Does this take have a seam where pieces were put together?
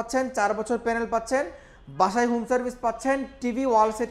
no; 0 cuts

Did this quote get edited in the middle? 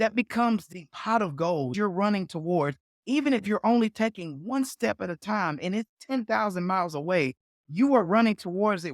yes; 1 cut; at 1.7 s

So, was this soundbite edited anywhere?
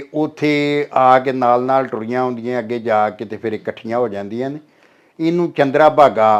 no; 0 cuts

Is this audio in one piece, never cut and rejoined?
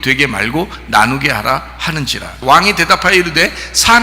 no; 1 cut; at 2.2 s

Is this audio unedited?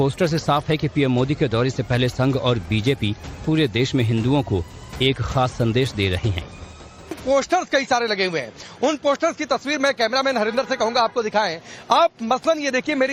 no; 1 cut; at 10.9 s

